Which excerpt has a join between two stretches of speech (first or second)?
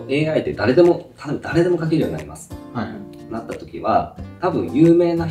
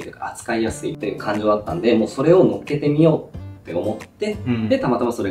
second